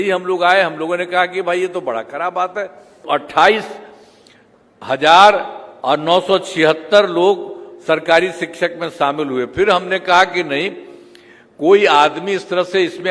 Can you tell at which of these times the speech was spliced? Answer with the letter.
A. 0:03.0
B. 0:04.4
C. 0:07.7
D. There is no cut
A